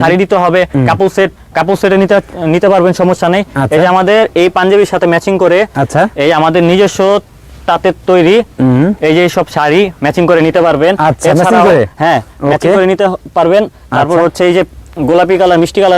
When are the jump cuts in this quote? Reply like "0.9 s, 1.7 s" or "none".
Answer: none